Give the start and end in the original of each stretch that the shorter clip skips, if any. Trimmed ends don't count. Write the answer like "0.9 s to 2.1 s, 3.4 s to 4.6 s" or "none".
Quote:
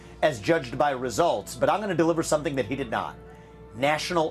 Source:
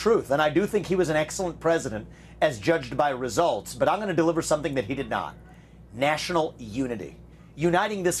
none